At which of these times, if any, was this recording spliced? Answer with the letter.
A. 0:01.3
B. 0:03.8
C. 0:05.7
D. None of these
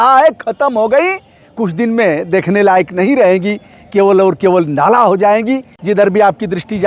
C